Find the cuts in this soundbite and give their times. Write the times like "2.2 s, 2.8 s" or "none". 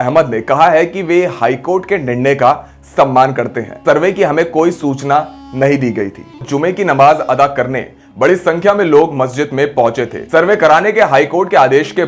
3.8 s, 6.5 s, 10.1 s